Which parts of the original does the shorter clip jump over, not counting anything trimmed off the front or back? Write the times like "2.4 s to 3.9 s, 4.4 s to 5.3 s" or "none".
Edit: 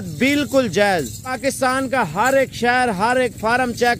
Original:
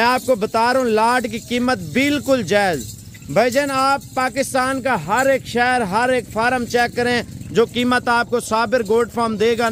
3.0 s to 4.2 s